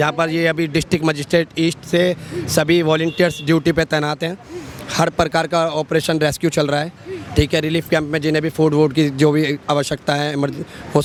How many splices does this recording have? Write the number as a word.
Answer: zero